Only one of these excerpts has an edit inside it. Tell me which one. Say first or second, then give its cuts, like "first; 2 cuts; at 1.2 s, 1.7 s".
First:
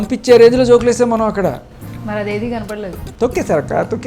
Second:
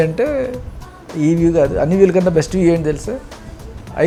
first; 1 cut; at 3.0 s